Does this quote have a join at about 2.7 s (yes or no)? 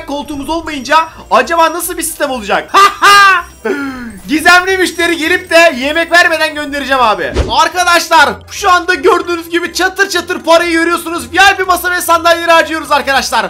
yes